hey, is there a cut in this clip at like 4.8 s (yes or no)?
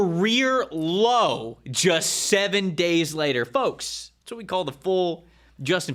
no